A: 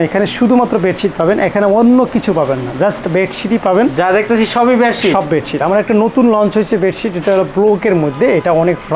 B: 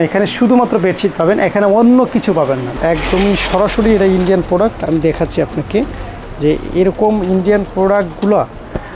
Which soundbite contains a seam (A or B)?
B